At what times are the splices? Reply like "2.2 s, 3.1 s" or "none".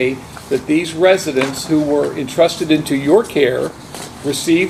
none